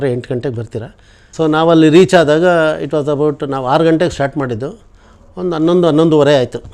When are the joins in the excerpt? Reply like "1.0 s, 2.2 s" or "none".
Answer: 1.4 s